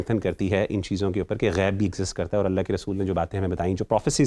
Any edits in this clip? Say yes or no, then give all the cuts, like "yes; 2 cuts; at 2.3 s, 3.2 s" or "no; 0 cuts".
no; 0 cuts